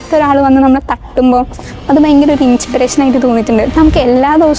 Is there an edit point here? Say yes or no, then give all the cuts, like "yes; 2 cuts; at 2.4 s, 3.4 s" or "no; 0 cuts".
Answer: yes; 1 cut; at 3.7 s